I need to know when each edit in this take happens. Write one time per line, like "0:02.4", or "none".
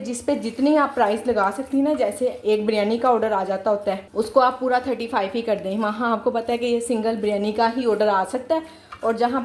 none